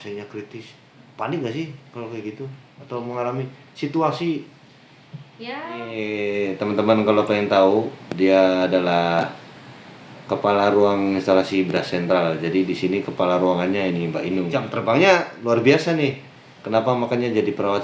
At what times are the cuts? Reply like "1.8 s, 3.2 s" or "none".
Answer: 5.9 s, 14.7 s